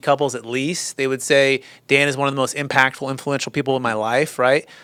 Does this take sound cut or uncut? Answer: uncut